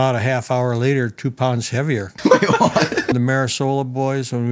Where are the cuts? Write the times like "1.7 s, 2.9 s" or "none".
2.1 s, 3.1 s